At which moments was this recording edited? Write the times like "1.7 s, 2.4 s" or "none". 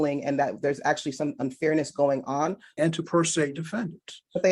2.6 s